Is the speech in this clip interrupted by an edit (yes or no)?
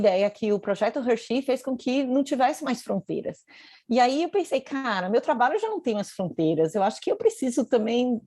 no